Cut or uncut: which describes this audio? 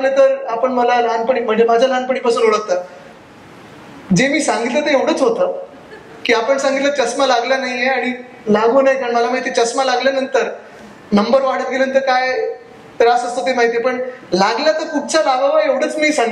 uncut